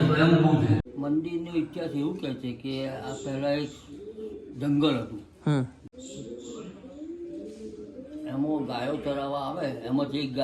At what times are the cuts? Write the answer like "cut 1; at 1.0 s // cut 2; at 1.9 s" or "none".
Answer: cut 1; at 0.9 s // cut 2; at 5.8 s